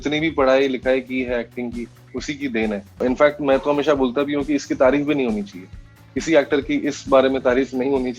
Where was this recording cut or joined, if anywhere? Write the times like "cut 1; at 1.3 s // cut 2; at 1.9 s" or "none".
none